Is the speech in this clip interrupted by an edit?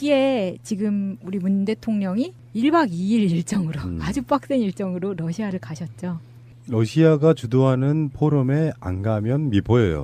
no; 0 cuts

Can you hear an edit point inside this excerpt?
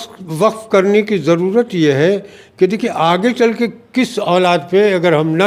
no; 0 cuts

